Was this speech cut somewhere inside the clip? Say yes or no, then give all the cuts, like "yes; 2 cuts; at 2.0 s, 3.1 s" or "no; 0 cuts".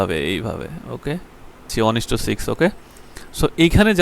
yes; 1 cut; at 1.7 s